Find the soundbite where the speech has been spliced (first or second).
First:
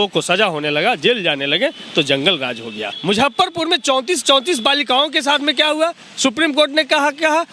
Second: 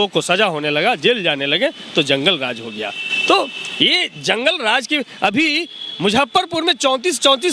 first